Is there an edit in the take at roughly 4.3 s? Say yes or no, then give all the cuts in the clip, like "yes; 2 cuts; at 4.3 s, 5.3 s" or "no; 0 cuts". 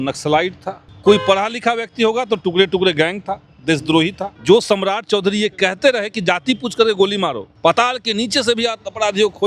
yes; 3 cuts; at 0.9 s, 4.3 s, 7.5 s